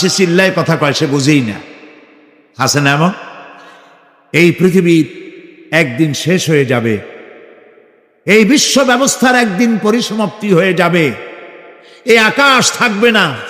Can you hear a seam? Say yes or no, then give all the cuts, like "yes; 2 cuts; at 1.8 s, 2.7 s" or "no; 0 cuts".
yes; 1 cut; at 4.4 s